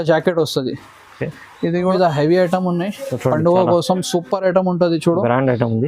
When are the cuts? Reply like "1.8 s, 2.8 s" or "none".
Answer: 1.9 s